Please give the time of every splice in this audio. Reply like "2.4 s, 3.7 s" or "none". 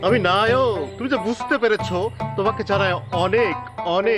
0.9 s

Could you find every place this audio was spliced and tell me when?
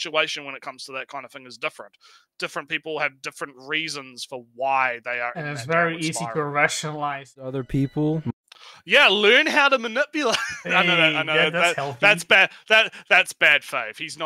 7.6 s

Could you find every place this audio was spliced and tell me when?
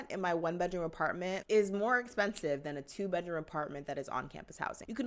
none

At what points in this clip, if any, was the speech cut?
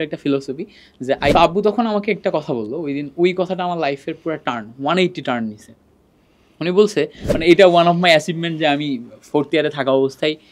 1.3 s, 7.3 s

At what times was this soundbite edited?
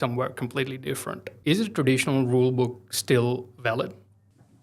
1.3 s

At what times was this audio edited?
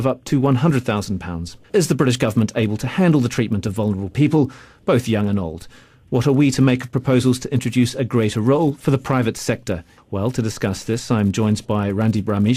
11.5 s

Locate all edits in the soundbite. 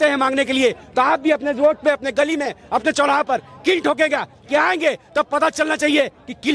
none

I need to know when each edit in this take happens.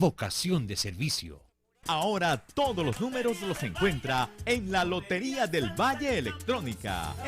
1.3 s

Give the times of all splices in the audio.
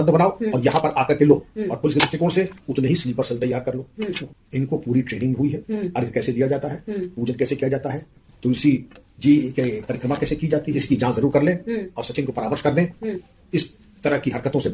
4.2 s, 10.8 s, 13.2 s

